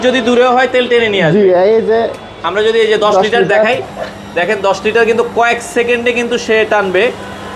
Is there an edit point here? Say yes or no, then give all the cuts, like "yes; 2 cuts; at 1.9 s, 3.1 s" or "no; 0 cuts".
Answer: no; 0 cuts